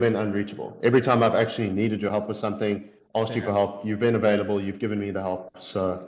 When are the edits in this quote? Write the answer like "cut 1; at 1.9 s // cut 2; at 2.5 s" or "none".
none